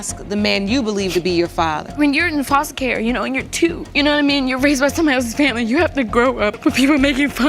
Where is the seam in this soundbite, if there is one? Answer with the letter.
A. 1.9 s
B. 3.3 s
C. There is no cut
A